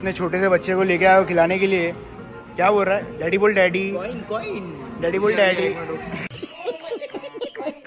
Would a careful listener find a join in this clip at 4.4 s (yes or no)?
no